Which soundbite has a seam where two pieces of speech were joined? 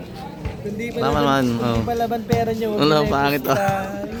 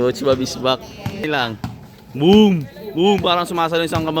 second; 1 cut; at 1.2 s

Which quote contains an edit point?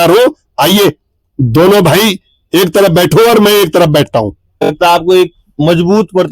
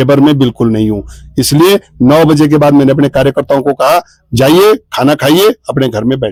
first; 1 cut; at 4.6 s

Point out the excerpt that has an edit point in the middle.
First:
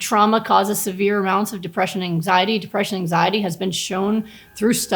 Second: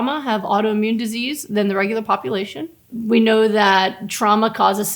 second; 1 cut; at 2.9 s

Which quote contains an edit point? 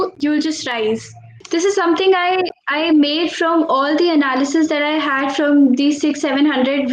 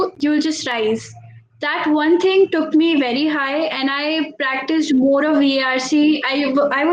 first; 1 cut; at 1.4 s

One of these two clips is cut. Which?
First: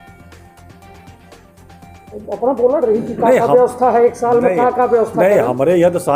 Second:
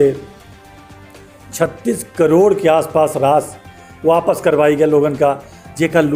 first; 1 cut; at 2.1 s

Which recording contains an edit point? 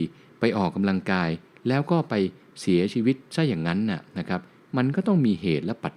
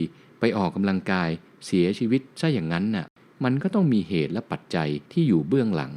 second; 3 cuts; at 1.5 s, 3.2 s, 5.0 s

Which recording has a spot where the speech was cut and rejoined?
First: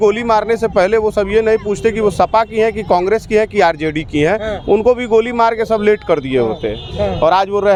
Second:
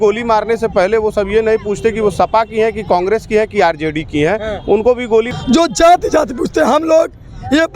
second; 1 cut; at 5.3 s

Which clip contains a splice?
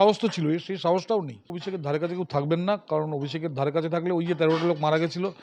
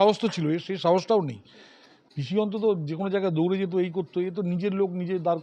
first; 1 cut; at 1.7 s

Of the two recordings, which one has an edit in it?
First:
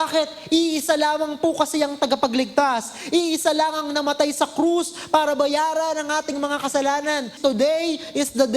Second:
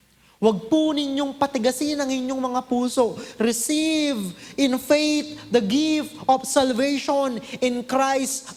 first; 1 cut; at 7.3 s

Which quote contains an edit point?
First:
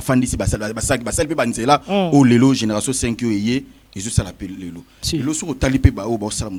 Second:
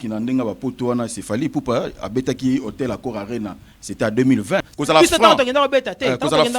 second; 1 cut; at 4.7 s

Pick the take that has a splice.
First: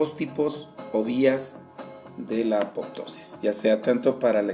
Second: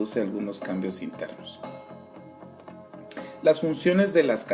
second; 1 cut; at 1.8 s

